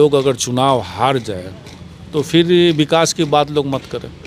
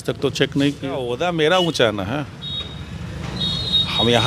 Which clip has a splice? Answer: second; 1 cut; at 1.2 s

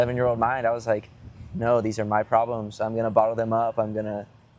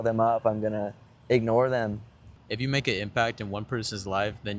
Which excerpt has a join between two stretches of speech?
second; 1 cut; at 2.3 s

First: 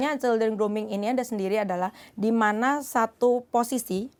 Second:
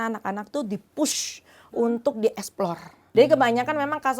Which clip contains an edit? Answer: second; 1 cut; at 2.9 s

